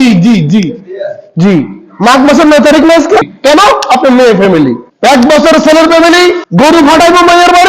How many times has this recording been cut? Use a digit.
3